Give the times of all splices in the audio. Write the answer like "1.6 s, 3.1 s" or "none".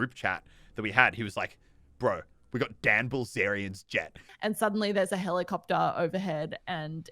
4.3 s